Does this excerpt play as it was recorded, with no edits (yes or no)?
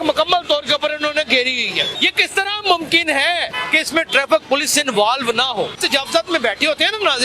no